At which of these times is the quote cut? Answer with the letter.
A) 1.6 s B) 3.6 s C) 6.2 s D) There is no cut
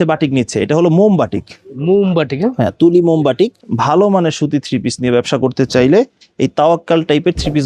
B